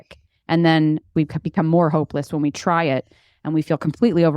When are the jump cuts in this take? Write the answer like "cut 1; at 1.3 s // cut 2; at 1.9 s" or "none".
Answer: cut 1; at 1.1 s